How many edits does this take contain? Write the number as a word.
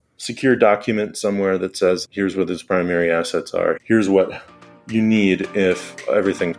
zero